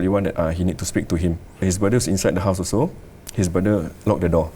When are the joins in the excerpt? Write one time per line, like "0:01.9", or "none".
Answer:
0:01.6